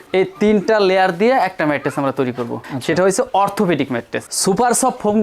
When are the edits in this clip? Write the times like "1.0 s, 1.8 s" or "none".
4.3 s